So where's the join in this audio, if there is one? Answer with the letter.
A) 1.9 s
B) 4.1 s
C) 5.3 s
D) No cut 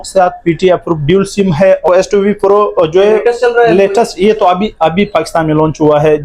A